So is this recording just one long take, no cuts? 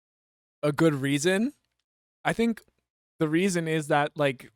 yes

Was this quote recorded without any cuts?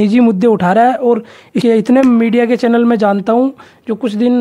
no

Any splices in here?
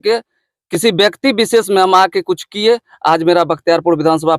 no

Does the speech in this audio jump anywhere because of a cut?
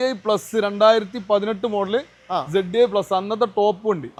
no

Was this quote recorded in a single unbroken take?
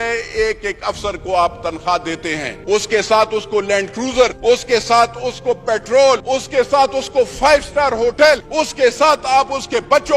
no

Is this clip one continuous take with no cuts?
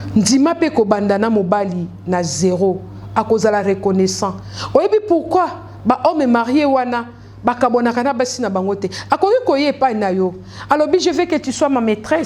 yes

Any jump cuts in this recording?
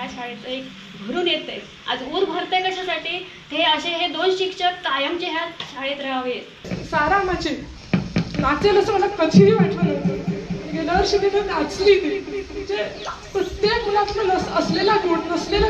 yes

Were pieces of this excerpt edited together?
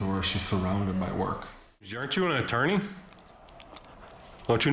yes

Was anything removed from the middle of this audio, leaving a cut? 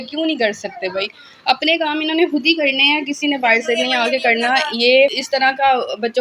yes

